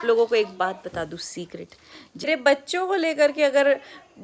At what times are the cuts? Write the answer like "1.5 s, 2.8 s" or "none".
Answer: 2.3 s